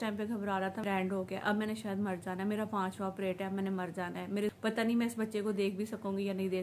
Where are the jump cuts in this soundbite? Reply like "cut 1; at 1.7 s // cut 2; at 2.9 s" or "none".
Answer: cut 1; at 0.8 s // cut 2; at 4.5 s

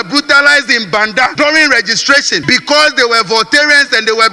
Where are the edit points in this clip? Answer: cut 1; at 1.3 s // cut 2; at 2.4 s

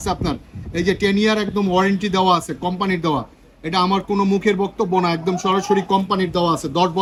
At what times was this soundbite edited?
none

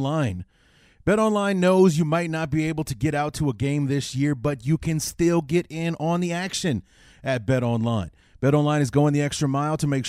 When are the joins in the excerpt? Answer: none

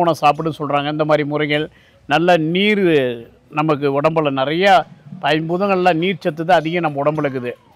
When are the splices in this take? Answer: none

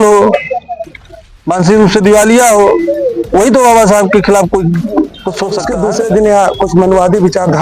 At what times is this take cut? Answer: cut 1; at 5.6 s

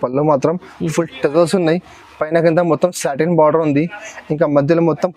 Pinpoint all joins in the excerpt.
none

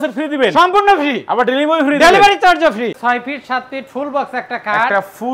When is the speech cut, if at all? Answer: cut 1; at 3.0 s

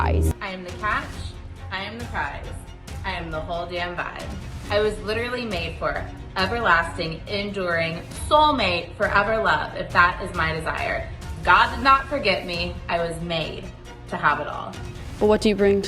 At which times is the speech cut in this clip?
none

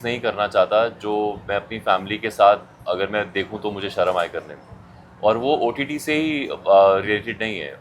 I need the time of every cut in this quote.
none

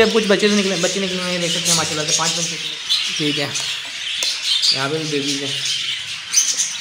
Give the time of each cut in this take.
cut 1; at 2.6 s

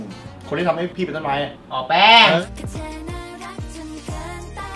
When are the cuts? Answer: none

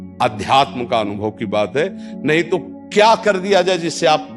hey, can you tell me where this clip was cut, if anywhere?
none

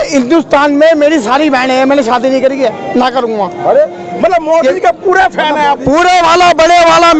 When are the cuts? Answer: none

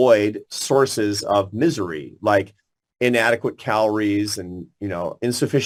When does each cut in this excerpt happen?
none

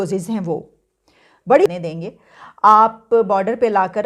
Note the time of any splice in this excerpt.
cut 1; at 1.7 s

